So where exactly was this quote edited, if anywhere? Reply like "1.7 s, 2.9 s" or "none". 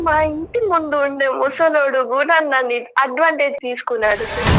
3.6 s